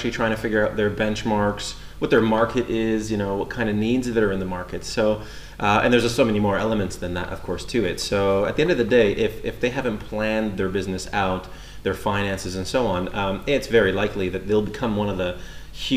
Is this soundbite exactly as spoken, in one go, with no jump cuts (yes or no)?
yes